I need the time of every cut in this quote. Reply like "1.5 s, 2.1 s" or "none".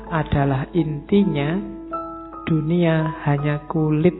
0.9 s